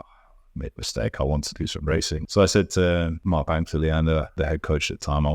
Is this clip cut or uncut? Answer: cut